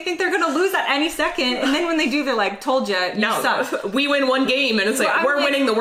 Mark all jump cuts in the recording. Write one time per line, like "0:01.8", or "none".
none